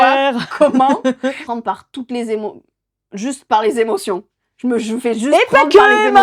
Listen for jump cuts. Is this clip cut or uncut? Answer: cut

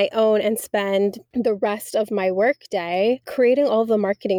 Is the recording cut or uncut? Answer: cut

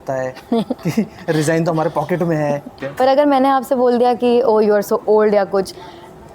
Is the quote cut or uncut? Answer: cut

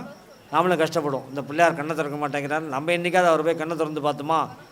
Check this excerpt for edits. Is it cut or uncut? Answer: uncut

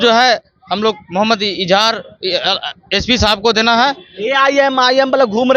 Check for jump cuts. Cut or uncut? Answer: uncut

